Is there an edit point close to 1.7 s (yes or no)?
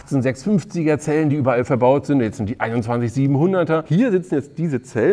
no